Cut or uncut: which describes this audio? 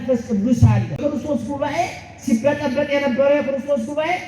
cut